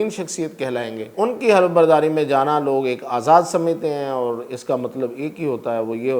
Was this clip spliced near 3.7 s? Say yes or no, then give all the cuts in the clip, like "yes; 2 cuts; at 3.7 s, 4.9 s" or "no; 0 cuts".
no; 1 cut; at 1.1 s